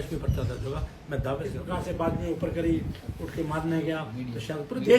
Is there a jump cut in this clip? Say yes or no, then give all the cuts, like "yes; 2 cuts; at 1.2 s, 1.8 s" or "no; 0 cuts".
yes; 1 cut; at 1.6 s